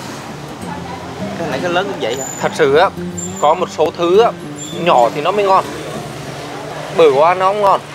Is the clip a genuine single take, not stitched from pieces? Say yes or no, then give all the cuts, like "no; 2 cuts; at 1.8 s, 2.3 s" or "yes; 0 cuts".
yes; 0 cuts